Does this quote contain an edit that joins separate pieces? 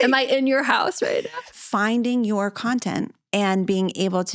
yes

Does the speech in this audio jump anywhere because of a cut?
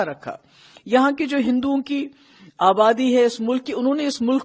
no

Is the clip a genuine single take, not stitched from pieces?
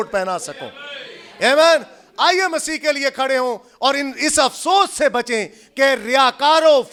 yes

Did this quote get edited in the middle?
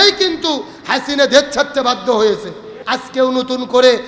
yes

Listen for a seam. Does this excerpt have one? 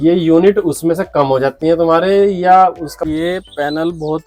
yes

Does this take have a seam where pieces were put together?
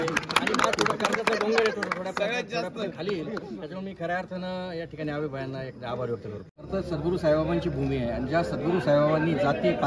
no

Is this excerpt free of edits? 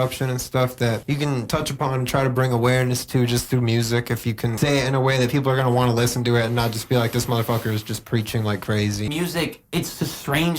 no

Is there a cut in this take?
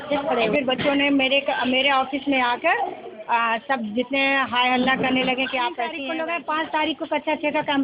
yes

